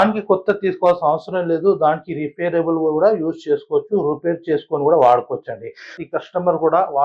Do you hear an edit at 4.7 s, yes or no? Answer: no